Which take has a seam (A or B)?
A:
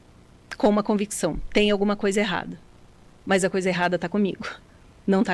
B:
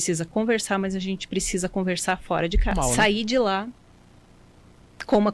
B